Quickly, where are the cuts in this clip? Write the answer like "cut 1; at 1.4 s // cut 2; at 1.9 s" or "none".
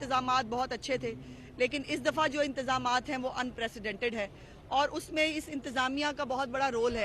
none